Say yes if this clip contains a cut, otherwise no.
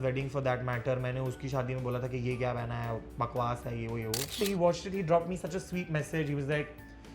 yes